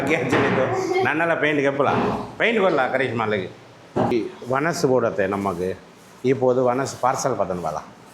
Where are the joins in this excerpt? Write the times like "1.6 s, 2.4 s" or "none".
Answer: 4.1 s